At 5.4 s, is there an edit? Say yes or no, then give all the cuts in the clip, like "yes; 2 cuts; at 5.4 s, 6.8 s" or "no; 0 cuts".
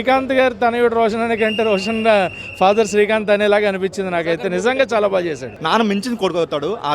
yes; 1 cut; at 5.4 s